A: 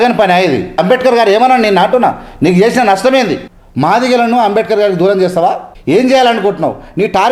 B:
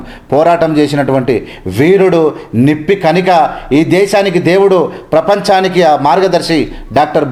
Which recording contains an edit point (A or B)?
A